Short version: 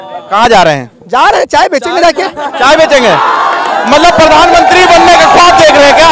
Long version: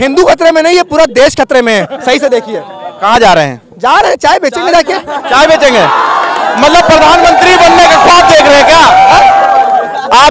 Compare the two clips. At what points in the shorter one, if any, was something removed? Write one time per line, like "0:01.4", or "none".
none